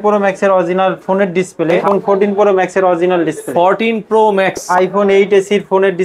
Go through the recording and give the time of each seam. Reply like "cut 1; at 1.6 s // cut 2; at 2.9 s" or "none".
cut 1; at 1.8 s // cut 2; at 4.6 s